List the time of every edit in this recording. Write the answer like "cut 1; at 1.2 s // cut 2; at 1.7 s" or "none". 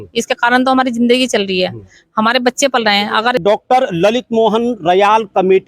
cut 1; at 3.4 s